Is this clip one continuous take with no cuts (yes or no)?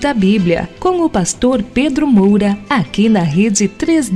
no